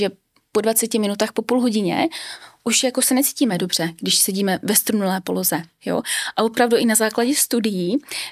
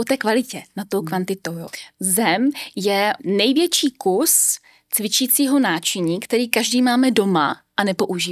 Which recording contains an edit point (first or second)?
second